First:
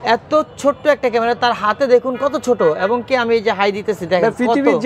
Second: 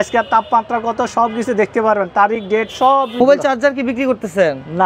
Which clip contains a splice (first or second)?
second